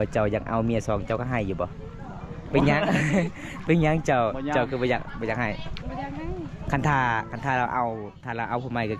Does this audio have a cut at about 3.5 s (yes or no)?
no